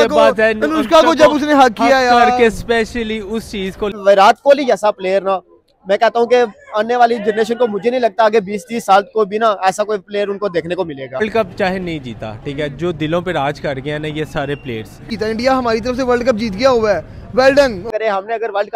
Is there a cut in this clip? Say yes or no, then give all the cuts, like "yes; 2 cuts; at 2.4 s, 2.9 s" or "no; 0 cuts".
yes; 4 cuts; at 4.0 s, 11.2 s, 15.1 s, 17.9 s